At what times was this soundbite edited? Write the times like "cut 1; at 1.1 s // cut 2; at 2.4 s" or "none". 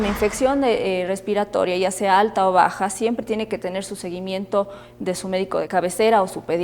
cut 1; at 5.7 s